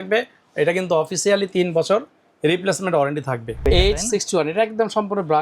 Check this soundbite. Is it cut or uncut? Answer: cut